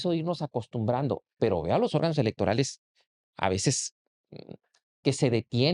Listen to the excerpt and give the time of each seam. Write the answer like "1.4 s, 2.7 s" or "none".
none

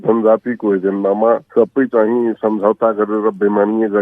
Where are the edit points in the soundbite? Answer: 1.5 s

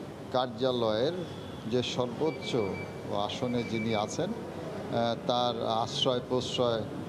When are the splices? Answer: none

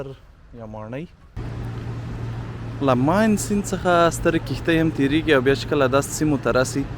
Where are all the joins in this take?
1.2 s

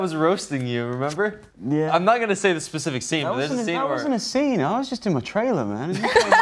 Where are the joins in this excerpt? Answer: 1.5 s

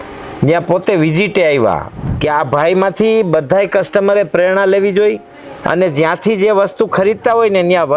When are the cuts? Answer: 2.0 s

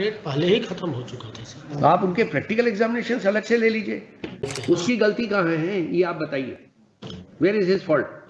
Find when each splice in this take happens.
4.5 s

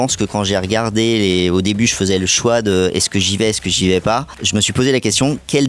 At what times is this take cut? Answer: none

